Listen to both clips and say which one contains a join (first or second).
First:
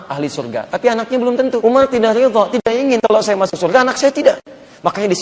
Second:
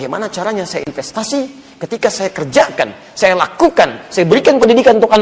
first